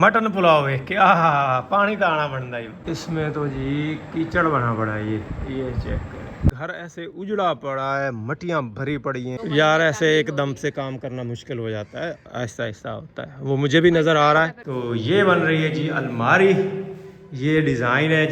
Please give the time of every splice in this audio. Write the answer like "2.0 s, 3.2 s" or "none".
2.7 s, 6.5 s, 9.4 s, 14.7 s